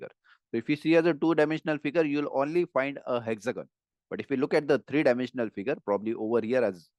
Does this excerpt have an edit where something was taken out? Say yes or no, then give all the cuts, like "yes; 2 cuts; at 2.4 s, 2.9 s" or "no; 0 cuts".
no; 0 cuts